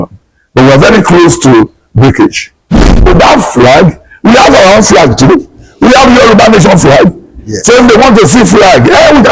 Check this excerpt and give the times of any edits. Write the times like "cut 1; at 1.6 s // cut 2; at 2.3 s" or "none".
cut 1; at 2.7 s